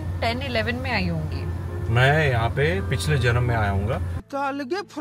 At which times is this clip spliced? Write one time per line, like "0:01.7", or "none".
none